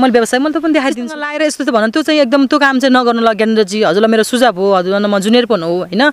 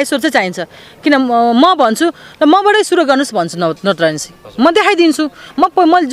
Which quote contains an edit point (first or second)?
first